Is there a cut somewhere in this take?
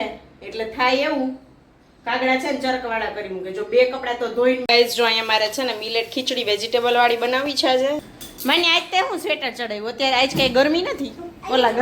yes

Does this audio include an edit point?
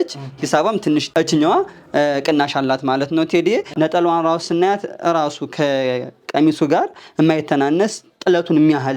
yes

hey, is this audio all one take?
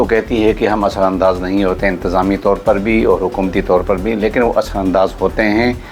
yes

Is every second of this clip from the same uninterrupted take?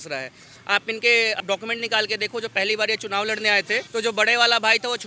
no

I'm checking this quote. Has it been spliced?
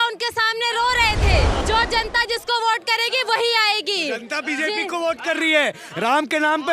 yes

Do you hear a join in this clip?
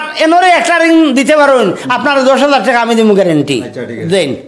no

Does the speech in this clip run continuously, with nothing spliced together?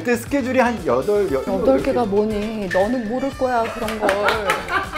no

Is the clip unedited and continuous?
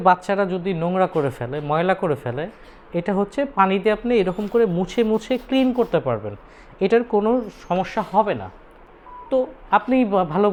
yes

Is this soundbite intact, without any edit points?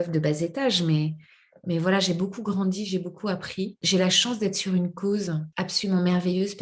no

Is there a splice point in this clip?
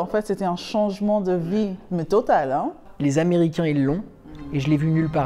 yes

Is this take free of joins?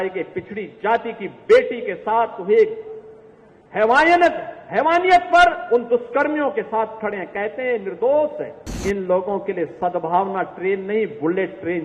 no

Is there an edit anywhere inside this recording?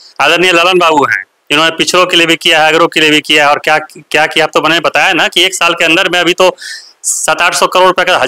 no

